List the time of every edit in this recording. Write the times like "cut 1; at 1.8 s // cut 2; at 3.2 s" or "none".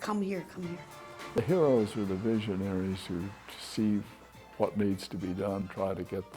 cut 1; at 1.4 s // cut 2; at 5.6 s